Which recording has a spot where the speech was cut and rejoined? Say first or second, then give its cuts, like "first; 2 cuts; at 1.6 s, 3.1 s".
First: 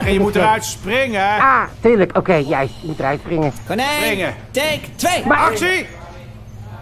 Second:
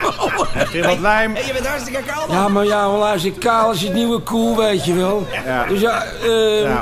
first; 1 cut; at 5.9 s